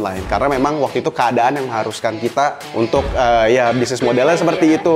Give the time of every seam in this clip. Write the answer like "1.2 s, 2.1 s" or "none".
2.6 s

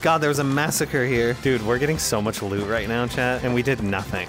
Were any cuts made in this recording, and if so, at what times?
1.4 s, 3.4 s

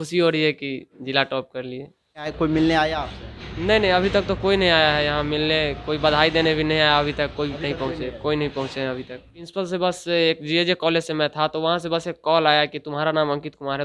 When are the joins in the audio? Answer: 2.3 s, 9.5 s

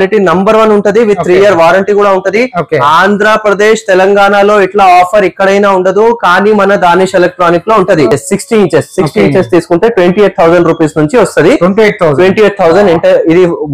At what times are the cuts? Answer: 8.1 s

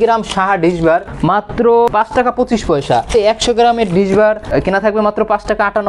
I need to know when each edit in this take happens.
1.1 s, 1.9 s, 3.1 s, 4.5 s

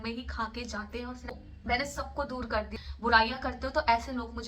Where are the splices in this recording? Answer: 1.3 s, 2.7 s

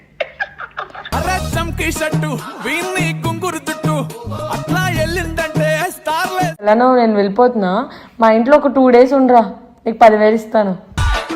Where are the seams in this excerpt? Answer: 6.7 s

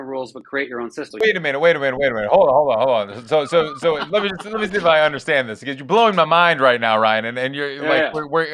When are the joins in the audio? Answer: 1.1 s

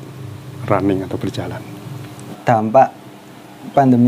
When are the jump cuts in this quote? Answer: 2.3 s

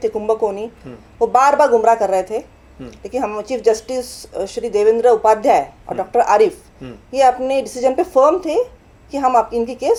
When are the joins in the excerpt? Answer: none

